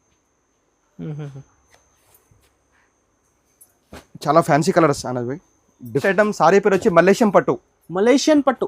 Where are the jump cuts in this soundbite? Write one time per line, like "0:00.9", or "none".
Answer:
0:06.0